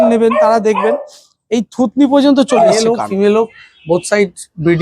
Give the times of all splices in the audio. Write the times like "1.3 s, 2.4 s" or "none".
2.8 s